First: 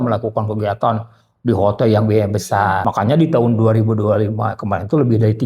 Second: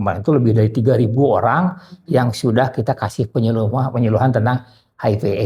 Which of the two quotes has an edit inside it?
first; 1 cut; at 2.3 s

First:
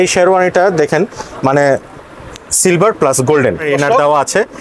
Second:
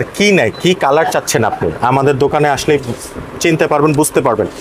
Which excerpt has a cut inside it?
first; 1 cut; at 3.6 s

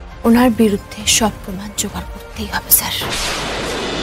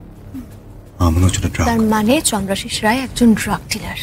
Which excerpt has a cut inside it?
second; 1 cut; at 1.6 s

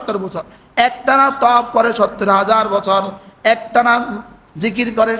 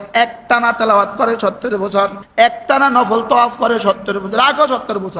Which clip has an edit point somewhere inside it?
second; 1 cut; at 2.2 s

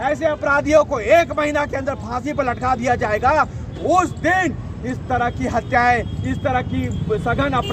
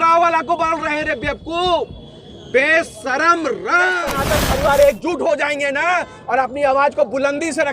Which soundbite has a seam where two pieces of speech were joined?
second; 1 cut; at 4.1 s

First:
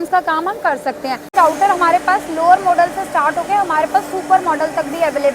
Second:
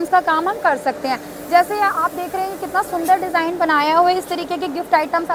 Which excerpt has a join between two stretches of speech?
first; 1 cut; at 1.3 s

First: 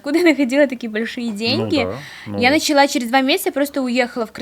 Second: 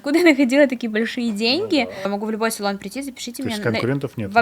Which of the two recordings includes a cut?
second; 1 cut; at 2.1 s

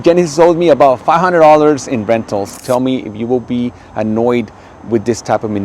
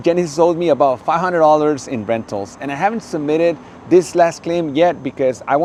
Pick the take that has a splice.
first; 1 cut; at 2.6 s

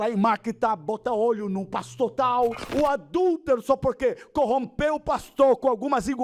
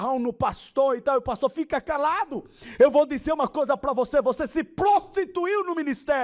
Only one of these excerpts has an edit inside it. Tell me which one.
first; 1 cut; at 2.6 s

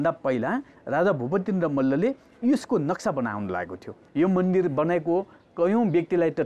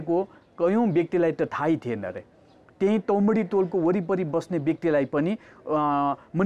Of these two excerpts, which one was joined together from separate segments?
first; 1 cut; at 4.0 s

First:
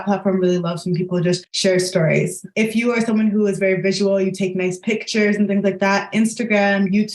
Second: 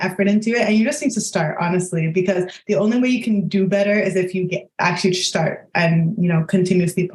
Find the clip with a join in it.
first; 2 cuts; at 1.5 s, 2.4 s

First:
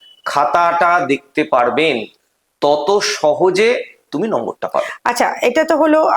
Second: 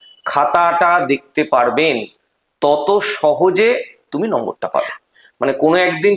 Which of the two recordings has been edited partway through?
second; 1 cut; at 5.0 s

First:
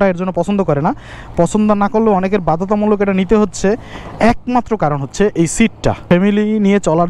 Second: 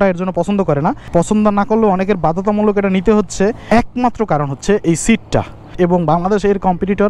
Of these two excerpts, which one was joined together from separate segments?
second; 3 cuts; at 1.0 s, 3.6 s, 5.6 s

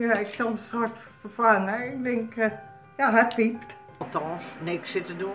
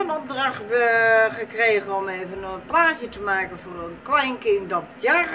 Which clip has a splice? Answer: first; 1 cut; at 4.0 s

